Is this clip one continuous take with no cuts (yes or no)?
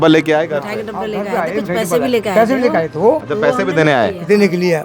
yes